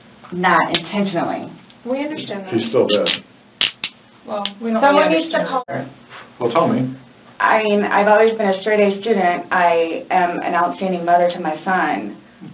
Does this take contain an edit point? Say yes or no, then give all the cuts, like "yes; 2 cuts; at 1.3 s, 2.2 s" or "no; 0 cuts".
yes; 1 cut; at 5.7 s